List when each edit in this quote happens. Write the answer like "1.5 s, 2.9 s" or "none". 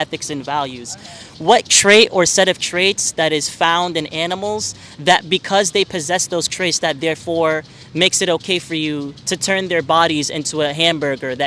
none